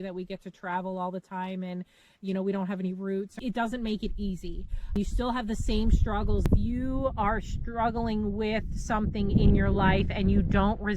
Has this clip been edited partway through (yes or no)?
yes